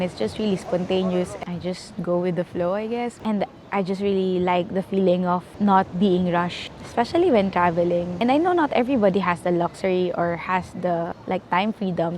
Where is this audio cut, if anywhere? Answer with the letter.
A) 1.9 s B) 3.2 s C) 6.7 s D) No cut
B